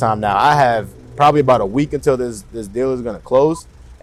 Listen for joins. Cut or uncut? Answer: uncut